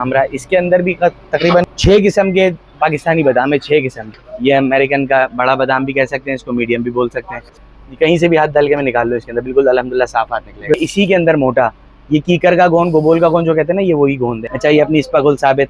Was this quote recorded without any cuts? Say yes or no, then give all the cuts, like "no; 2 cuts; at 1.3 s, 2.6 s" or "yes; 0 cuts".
no; 5 cuts; at 1.7 s, 4.1 s, 7.5 s, 10.7 s, 14.5 s